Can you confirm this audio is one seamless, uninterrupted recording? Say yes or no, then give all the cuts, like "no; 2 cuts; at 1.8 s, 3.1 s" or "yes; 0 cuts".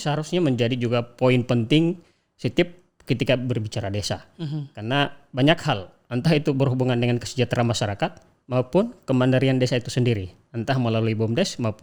yes; 0 cuts